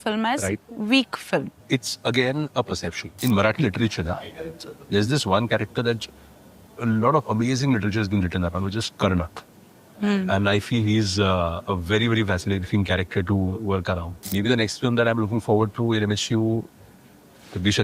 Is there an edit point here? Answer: yes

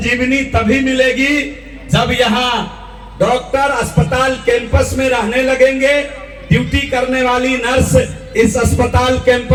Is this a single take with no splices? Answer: yes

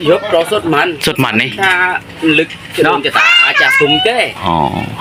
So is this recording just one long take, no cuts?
yes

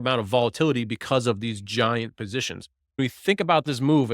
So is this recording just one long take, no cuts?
no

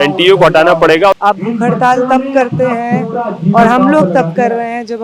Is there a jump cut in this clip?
yes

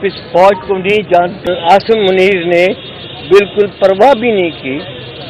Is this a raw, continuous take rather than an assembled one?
no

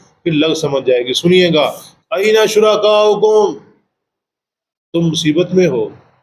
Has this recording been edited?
yes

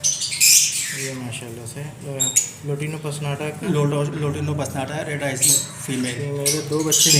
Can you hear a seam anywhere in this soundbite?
no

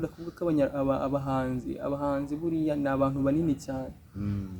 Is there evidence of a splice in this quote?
no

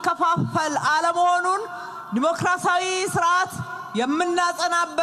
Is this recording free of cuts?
yes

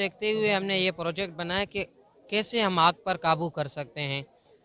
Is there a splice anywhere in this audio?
no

